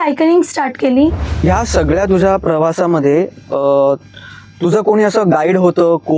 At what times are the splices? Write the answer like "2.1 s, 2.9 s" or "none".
1.3 s